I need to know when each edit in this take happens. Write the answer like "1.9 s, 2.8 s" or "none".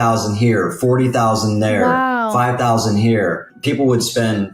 3.5 s